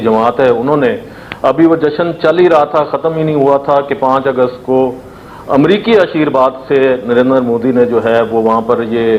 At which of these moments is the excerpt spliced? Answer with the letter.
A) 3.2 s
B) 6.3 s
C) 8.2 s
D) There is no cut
D